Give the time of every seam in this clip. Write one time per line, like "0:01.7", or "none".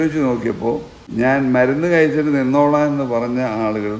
0:01.0